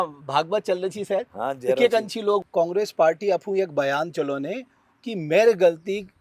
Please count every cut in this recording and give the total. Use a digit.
1